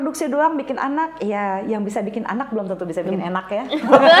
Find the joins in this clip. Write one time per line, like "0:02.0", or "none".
none